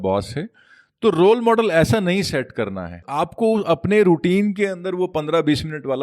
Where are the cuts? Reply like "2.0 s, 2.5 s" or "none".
2.9 s